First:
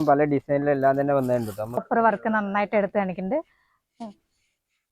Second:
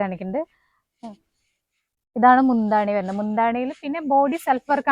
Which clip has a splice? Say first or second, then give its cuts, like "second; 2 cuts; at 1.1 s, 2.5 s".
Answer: first; 1 cut; at 1.8 s